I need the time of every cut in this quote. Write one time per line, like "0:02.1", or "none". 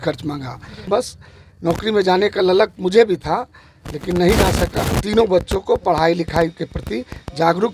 0:00.9
0:05.0